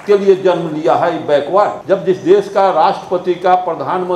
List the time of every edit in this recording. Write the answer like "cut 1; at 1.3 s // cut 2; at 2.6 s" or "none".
cut 1; at 1.8 s